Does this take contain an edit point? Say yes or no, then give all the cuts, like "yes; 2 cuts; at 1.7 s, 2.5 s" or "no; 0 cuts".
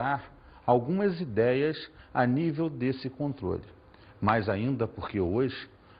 no; 0 cuts